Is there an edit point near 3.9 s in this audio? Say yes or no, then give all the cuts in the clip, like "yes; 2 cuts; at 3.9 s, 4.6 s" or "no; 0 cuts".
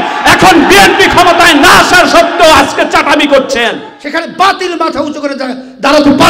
yes; 1 cut; at 3.9 s